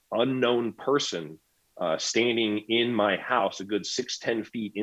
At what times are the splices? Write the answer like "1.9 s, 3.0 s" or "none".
none